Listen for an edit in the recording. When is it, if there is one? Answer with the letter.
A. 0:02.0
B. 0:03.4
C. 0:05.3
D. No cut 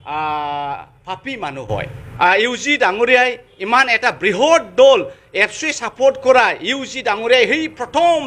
A